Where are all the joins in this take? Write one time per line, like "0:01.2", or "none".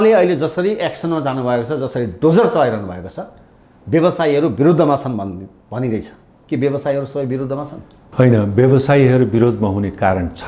none